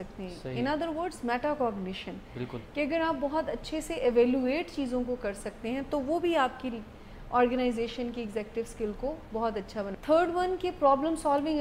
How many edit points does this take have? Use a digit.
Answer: 1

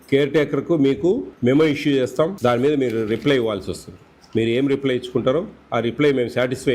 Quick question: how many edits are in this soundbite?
2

